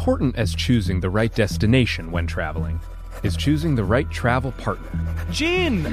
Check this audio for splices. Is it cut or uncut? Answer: uncut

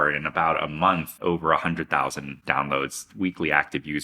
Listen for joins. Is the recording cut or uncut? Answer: cut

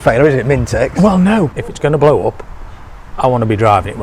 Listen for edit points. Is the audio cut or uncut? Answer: cut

